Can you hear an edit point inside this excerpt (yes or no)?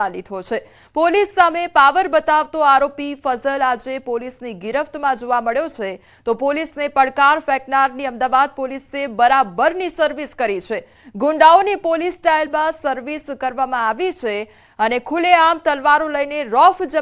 yes